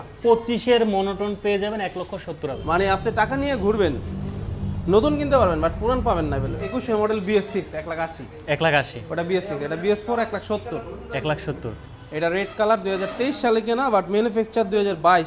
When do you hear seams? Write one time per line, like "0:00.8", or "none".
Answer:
0:02.5
0:06.6